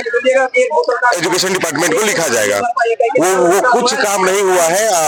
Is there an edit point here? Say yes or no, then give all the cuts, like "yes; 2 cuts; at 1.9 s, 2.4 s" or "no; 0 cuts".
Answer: no; 0 cuts